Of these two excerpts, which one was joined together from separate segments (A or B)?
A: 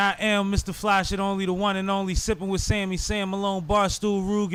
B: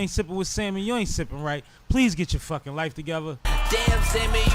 B